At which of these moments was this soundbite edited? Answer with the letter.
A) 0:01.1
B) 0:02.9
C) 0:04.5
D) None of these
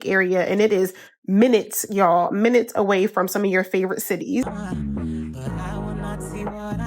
C